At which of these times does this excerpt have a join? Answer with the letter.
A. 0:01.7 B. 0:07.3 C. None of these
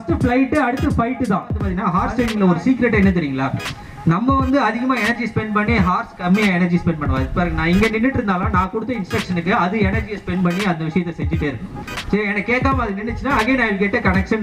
A